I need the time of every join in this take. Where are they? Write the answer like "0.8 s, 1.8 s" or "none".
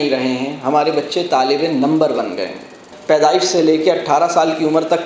2.9 s